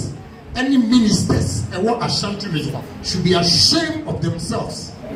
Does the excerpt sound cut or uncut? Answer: uncut